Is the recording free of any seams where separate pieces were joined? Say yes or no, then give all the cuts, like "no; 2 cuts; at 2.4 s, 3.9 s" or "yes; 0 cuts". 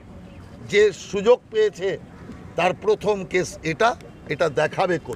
yes; 0 cuts